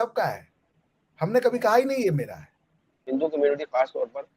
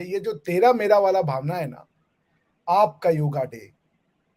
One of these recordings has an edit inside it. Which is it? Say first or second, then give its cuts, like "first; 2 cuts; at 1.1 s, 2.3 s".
first; 1 cut; at 2.9 s